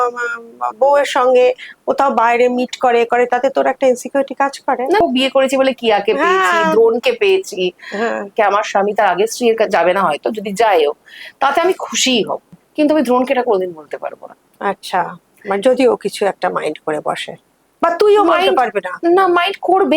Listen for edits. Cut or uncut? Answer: cut